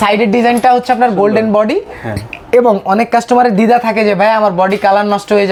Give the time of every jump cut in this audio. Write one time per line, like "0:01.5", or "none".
none